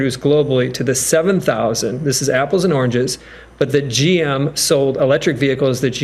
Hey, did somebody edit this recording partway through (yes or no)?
no